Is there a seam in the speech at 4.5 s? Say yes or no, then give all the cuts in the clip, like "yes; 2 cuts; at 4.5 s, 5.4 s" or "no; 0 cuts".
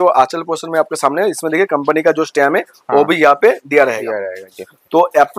no; 0 cuts